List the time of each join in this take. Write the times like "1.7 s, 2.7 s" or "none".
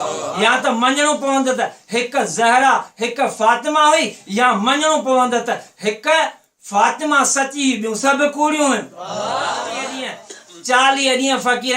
10.1 s